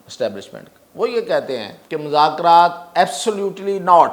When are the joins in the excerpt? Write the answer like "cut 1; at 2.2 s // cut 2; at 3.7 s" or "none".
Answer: cut 1; at 1.8 s